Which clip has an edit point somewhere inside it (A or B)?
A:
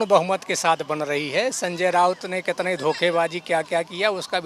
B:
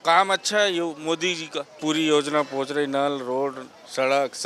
B